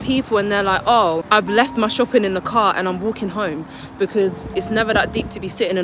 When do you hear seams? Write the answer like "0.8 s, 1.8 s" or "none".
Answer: 1.2 s, 4.5 s